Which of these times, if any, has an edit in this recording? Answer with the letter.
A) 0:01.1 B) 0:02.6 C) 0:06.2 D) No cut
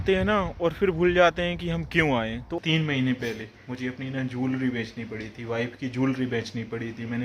B